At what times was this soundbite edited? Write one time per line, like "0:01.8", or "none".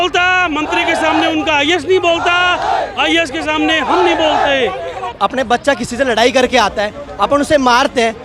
0:05.0